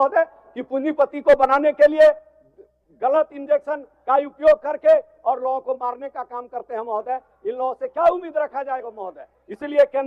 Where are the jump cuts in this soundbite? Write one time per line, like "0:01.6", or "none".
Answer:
none